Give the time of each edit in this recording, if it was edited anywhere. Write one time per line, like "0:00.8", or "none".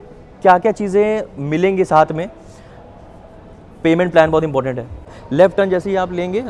0:05.2